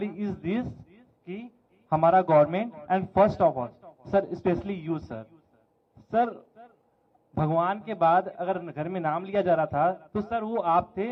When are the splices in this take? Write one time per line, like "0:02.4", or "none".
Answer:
none